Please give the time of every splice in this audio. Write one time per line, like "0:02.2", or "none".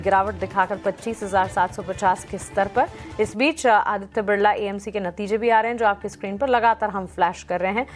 0:05.4